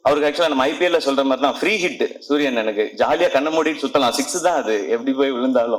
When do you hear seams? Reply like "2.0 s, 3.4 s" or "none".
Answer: none